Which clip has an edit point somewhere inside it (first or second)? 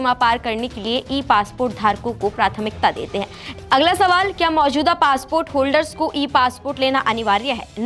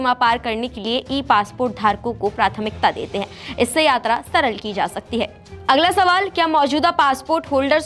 first